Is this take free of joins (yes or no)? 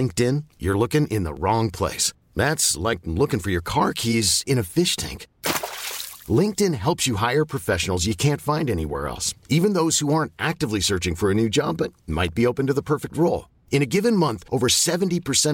yes